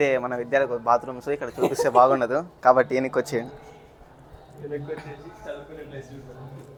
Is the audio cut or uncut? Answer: uncut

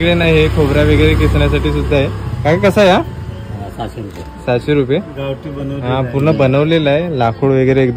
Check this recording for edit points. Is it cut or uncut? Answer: uncut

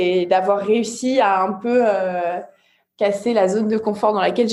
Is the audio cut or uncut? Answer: uncut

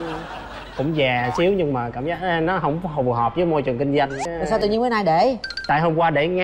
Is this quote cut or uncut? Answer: cut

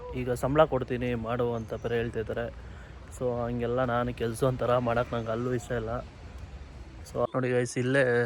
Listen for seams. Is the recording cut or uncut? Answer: cut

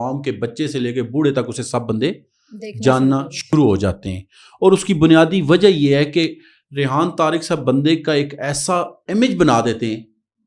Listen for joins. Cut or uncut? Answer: uncut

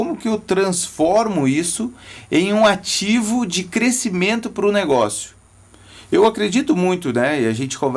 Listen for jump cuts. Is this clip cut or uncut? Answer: uncut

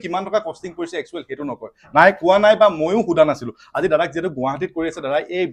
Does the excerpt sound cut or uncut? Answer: uncut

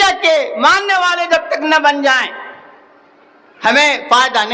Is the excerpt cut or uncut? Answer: uncut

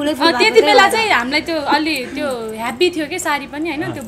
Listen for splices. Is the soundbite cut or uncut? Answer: uncut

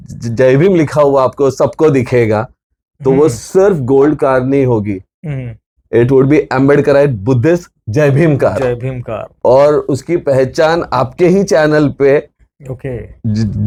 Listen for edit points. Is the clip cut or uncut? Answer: uncut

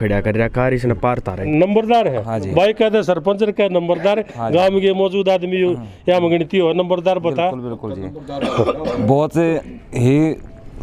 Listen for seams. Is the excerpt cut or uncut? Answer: cut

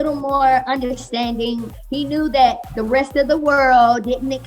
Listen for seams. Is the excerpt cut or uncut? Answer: cut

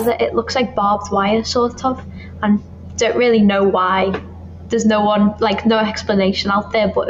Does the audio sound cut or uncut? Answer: uncut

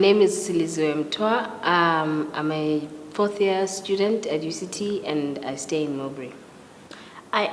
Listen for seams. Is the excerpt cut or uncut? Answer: cut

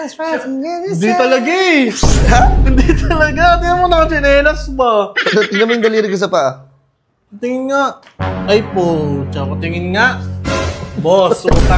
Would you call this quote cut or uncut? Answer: uncut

